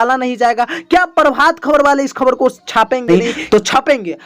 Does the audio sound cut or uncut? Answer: cut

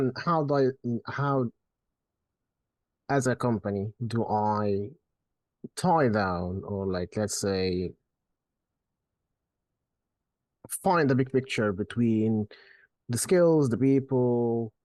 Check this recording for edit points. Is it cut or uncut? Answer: uncut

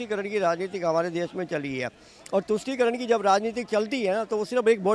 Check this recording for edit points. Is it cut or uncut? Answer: uncut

